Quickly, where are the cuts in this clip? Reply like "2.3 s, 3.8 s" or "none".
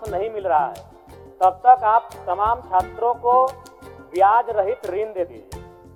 none